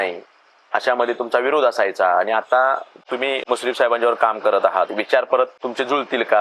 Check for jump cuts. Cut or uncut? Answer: uncut